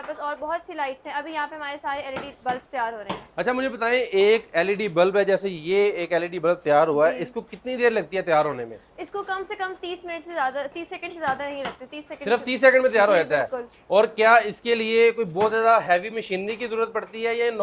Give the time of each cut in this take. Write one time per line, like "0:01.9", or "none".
none